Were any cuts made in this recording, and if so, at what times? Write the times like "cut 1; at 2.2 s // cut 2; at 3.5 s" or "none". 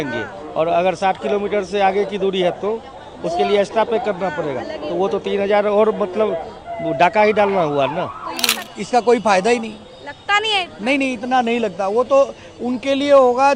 cut 1; at 8.5 s